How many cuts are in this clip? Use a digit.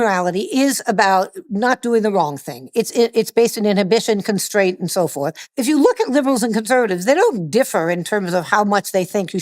1